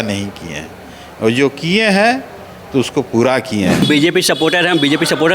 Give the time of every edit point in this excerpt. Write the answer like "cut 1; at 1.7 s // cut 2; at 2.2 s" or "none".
cut 1; at 3.9 s

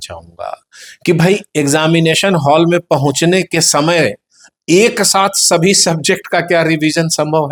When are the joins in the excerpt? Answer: none

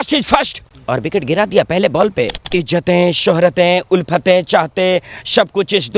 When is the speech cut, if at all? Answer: cut 1; at 2.4 s

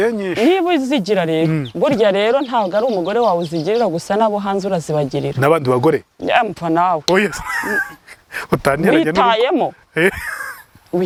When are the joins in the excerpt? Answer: none

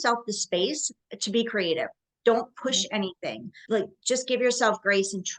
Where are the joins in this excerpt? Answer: none

